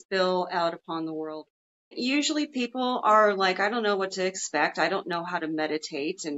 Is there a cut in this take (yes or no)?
yes